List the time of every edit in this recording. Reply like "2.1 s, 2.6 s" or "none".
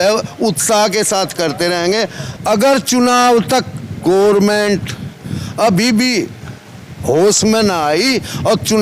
2.2 s